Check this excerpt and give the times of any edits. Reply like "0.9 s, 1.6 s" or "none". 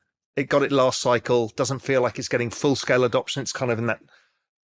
none